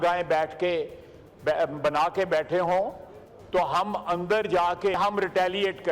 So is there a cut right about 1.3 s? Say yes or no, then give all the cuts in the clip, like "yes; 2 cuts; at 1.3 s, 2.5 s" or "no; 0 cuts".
no; 1 cut; at 5.0 s